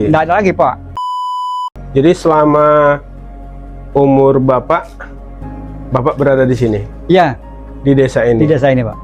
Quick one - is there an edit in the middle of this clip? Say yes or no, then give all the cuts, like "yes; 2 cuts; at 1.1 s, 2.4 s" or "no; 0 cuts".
yes; 1 cut; at 1.5 s